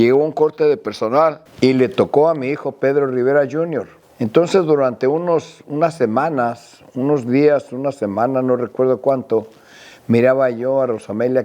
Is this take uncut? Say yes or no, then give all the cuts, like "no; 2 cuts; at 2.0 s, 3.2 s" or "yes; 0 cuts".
yes; 0 cuts